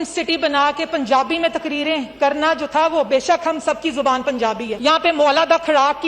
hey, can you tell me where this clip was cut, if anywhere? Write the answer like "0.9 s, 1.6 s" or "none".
4.7 s